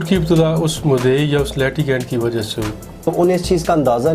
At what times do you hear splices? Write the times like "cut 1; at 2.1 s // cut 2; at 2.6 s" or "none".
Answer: cut 1; at 2.9 s